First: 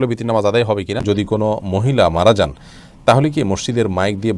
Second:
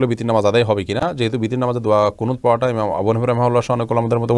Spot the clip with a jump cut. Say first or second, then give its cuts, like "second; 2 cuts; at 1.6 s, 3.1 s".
first; 1 cut; at 1.0 s